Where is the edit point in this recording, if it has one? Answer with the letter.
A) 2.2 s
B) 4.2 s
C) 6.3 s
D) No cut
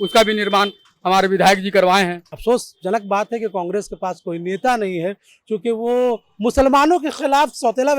A